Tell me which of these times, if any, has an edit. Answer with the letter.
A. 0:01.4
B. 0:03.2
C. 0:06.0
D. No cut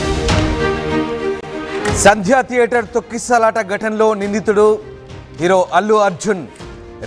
A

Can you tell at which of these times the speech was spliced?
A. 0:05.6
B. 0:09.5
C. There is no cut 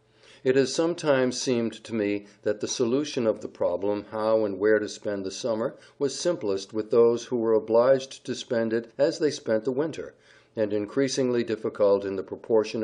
A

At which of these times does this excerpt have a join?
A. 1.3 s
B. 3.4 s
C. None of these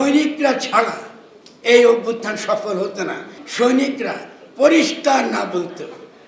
B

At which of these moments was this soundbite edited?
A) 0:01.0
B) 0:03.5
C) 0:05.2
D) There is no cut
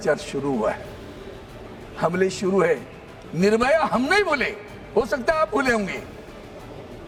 D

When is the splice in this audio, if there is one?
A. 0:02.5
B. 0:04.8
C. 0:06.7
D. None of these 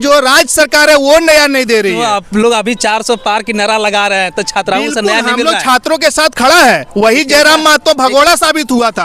D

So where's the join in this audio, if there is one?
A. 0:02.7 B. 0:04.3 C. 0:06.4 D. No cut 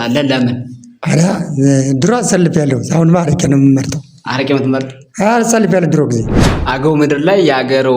C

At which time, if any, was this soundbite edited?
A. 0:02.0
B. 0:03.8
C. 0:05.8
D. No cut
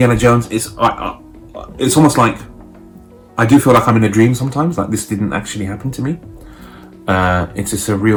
D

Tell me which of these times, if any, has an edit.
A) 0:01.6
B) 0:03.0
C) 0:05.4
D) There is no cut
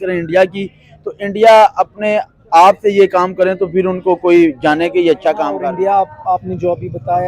C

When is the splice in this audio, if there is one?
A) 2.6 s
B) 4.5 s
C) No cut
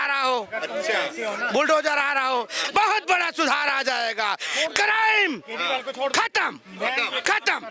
A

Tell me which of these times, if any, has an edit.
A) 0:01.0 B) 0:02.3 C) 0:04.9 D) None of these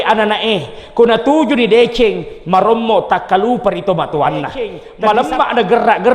C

